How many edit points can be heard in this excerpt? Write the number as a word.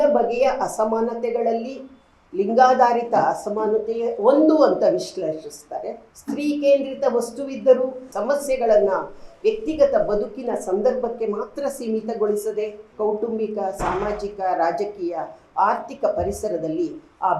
three